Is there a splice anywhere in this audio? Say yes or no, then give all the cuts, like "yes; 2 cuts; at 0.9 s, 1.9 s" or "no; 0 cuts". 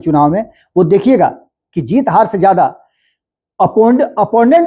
no; 0 cuts